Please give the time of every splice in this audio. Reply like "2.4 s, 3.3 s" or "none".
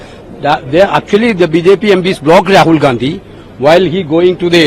none